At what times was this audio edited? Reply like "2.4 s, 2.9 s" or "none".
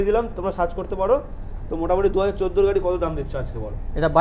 none